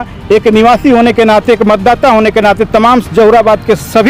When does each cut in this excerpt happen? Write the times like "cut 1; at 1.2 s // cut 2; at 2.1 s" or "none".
none